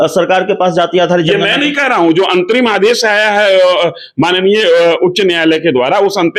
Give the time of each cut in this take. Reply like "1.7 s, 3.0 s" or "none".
none